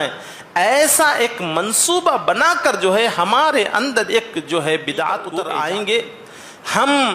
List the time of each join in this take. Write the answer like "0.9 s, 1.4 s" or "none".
5.3 s

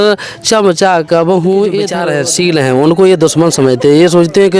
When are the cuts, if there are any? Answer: 2.0 s

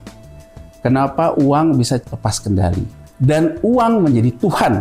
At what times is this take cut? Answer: 2.0 s, 3.0 s

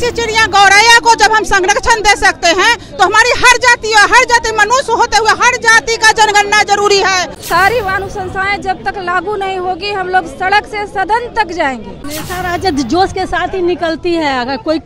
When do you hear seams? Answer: 7.3 s, 12.0 s

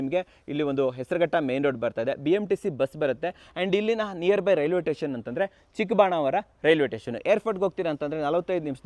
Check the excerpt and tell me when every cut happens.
none

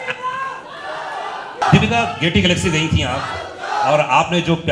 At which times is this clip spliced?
1.6 s

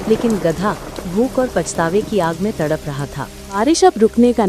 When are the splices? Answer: 3.6 s

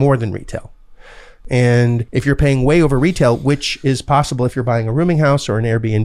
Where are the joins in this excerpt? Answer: 1.3 s, 2.0 s

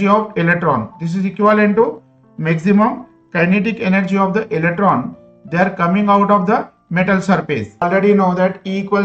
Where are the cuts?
7.8 s

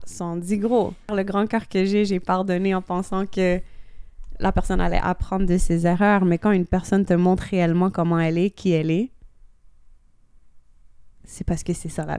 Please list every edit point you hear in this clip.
1.1 s

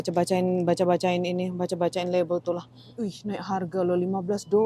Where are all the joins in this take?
3.2 s

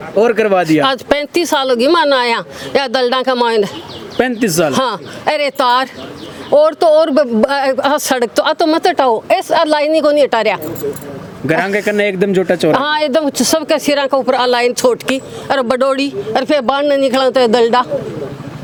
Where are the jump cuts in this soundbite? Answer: none

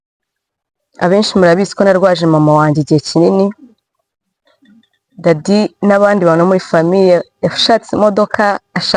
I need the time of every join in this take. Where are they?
none

